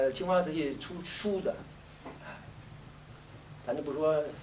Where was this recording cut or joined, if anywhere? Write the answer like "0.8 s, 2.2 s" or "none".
none